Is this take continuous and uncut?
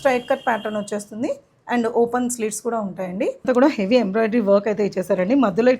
no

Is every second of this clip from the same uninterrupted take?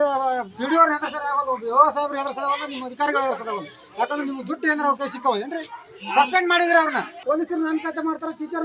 no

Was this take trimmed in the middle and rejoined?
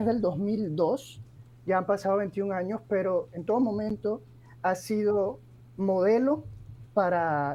no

